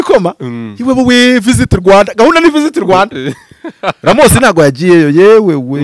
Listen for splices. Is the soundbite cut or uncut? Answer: uncut